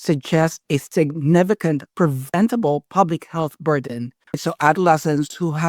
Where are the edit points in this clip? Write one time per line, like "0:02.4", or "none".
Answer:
0:01.9
0:04.3